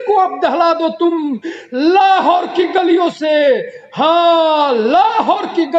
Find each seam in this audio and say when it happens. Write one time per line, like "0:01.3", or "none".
none

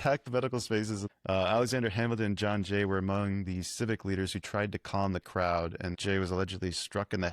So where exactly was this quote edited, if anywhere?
0:01.0
0:06.0

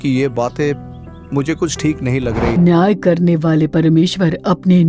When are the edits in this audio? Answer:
0:02.6

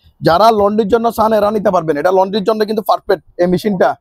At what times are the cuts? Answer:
none

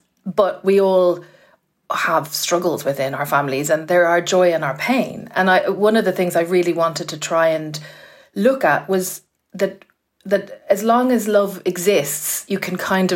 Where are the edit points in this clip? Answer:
none

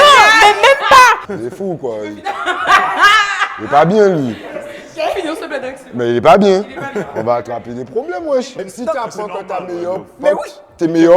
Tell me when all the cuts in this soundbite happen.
0:01.3
0:08.6

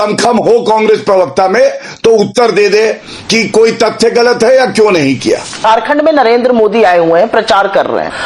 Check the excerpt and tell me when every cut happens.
0:05.6

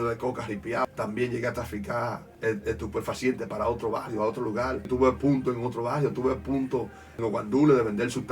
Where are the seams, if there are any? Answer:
0:00.9
0:02.3
0:04.9
0:07.2

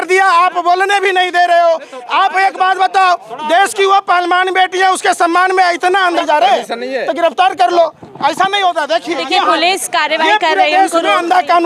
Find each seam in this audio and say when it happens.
0:06.2

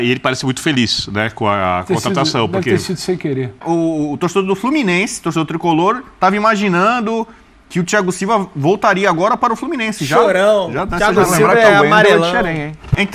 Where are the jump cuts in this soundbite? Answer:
0:03.6

